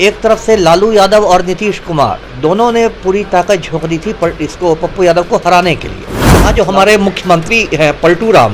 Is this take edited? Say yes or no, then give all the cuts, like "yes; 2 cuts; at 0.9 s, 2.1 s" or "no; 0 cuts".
yes; 1 cut; at 6.5 s